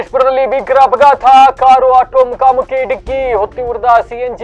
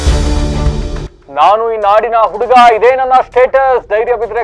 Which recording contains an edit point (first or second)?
second